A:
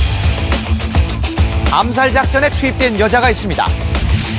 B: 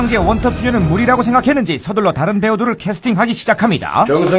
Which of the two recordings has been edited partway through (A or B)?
B